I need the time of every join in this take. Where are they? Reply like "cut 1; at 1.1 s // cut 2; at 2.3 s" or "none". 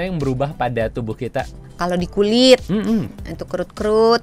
cut 1; at 1.6 s